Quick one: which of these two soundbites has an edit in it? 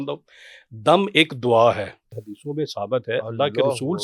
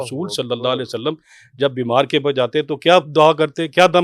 first; 1 cut; at 2.3 s

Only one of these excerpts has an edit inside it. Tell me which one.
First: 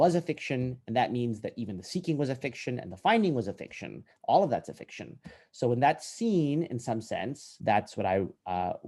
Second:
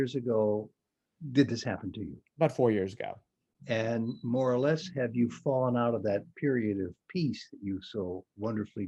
first; 1 cut; at 7.5 s

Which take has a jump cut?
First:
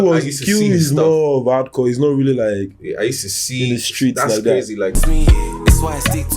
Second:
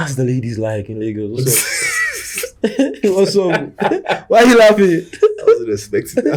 first; 1 cut; at 5.0 s

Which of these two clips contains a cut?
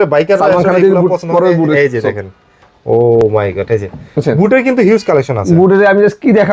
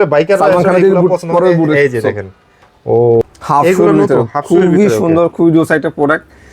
second; 1 cut; at 3.2 s

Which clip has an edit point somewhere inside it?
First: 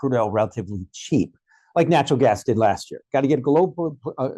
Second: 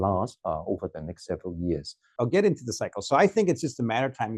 second; 1 cut; at 2.1 s

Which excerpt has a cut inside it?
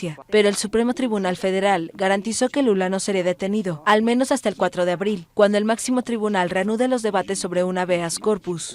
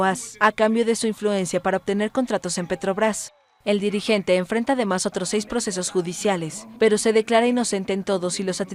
first; 1 cut; at 1.4 s

